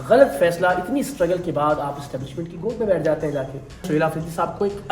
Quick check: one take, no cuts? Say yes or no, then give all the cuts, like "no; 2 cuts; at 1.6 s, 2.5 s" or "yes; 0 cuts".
no; 1 cut; at 3.9 s